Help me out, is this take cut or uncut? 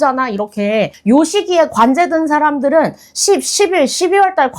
cut